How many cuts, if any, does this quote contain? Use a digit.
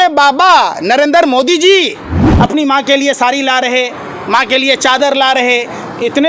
1